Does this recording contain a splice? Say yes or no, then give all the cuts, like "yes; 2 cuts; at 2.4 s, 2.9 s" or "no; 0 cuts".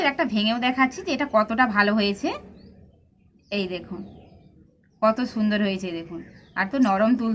no; 0 cuts